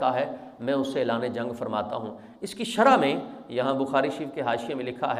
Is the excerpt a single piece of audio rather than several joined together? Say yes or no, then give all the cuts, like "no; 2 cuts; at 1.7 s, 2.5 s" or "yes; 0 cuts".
yes; 0 cuts